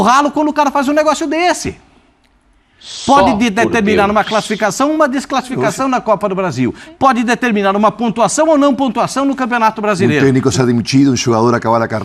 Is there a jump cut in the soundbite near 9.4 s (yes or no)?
no